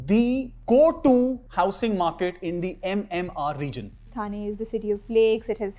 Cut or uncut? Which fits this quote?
cut